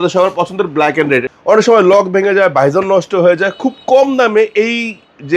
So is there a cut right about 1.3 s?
yes; 1 cut; at 1.3 s

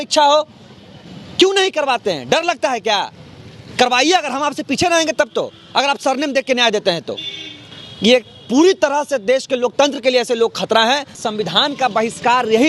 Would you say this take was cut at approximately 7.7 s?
no; 1 cut; at 11.2 s

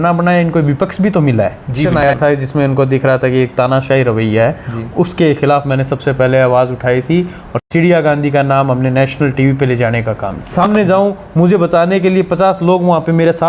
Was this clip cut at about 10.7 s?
yes; 3 cuts; at 2.0 s, 7.5 s, 10.7 s

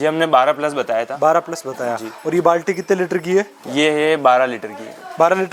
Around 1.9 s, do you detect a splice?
no; 0 cuts

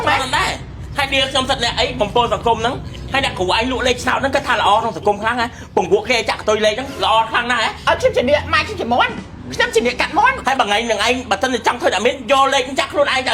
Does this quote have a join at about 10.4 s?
yes; 2 cuts; at 7.7 s, 10.4 s

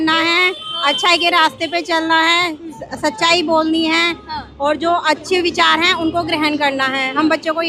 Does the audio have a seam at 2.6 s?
no; 0 cuts

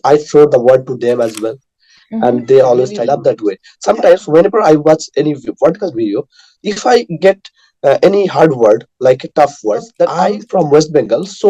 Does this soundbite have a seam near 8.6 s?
no; 2 cuts; at 3.0 s, 10.2 s

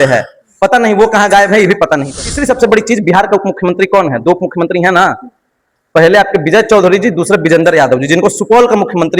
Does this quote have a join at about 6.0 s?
no; 1 cut; at 2.1 s

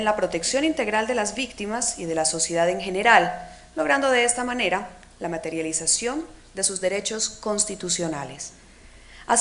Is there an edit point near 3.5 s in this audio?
no; 1 cut; at 1.9 s

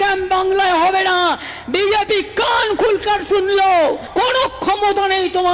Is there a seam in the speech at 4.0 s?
yes; 1 cut; at 4.0 s

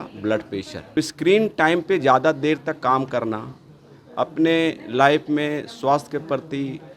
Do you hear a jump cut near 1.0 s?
yes; 1 cut; at 1.0 s

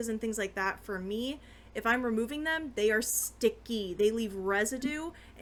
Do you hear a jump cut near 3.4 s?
no; 0 cuts

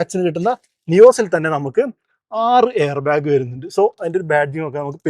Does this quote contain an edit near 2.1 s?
no; 0 cuts

